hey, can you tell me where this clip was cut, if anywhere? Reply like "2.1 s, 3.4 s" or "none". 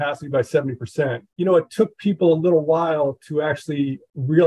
none